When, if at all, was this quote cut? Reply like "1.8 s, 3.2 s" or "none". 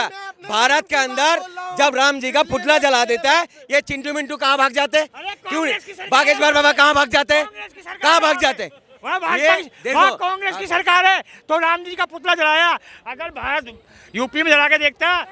none